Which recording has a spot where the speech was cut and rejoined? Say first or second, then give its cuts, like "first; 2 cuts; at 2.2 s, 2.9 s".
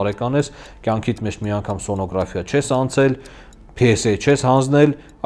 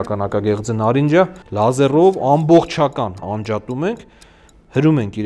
second; 2 cuts; at 1.4 s, 3.2 s